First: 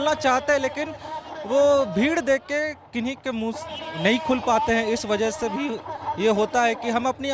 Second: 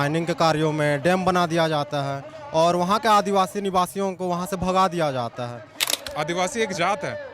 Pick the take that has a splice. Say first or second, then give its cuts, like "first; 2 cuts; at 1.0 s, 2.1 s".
second; 1 cut; at 6.0 s